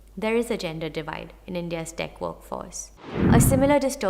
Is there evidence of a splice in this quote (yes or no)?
yes